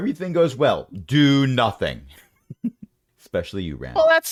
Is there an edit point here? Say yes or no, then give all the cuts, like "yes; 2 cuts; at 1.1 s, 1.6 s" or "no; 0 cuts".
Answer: no; 0 cuts